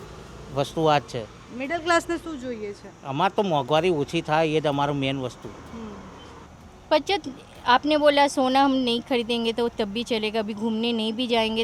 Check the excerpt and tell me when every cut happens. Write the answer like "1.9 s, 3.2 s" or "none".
6.5 s

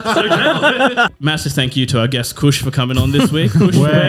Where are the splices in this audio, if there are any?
1.1 s

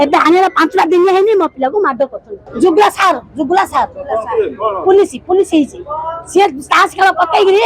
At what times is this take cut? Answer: 2.5 s

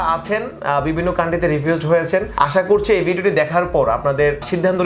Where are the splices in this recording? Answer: none

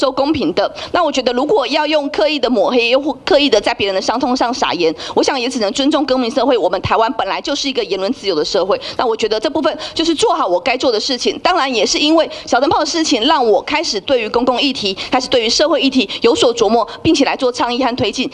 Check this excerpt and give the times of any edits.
none

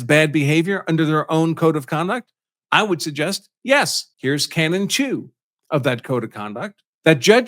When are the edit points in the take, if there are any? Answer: 4.0 s

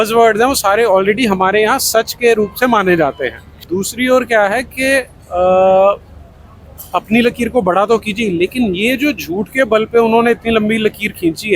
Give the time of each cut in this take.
3.6 s

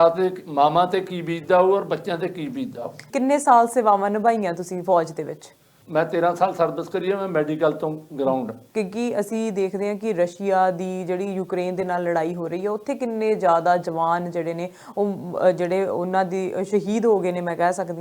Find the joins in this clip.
3.0 s, 5.7 s, 8.6 s

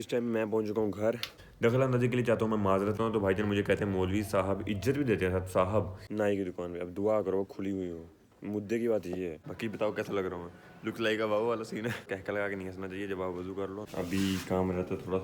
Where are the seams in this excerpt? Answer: 3.0 s, 6.0 s, 9.5 s, 12.1 s, 13.8 s

